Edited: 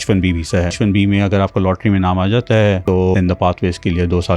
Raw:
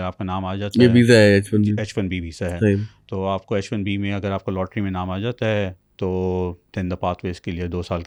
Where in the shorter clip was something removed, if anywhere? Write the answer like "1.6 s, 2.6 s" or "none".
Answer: 0.7 s, 3.0 s